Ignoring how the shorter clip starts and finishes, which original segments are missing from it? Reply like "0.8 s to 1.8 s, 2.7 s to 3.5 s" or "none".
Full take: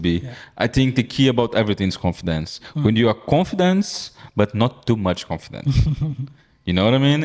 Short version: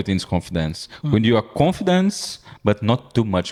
none